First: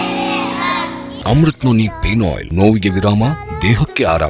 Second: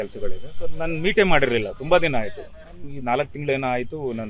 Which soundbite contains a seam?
first; 2 cuts; at 1.1 s, 2.4 s

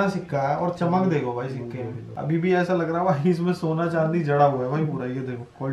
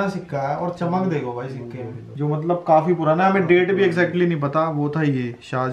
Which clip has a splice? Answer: second; 1 cut; at 2.1 s

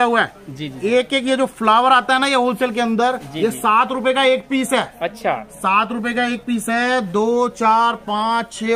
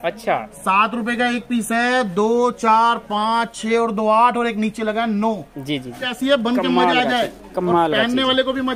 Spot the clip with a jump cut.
second; 1 cut; at 6.1 s

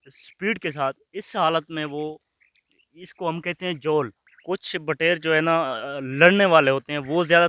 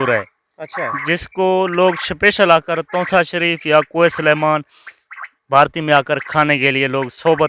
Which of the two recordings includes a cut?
first; 1 cut; at 4.2 s

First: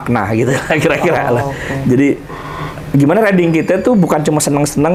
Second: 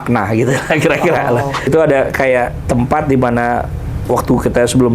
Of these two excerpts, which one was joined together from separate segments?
second; 1 cut; at 1.7 s

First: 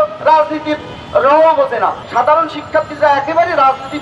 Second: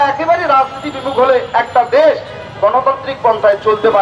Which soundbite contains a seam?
first; 1 cut; at 2.0 s

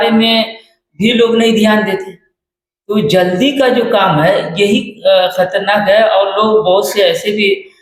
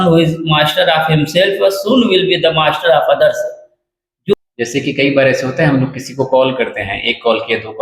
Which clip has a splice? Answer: second; 1 cut; at 4.3 s

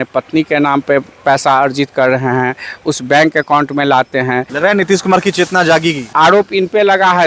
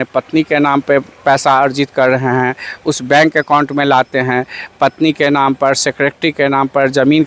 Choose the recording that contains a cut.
first; 2 cuts; at 4.5 s, 6.0 s

